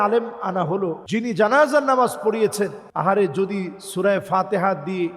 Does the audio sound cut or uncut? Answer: cut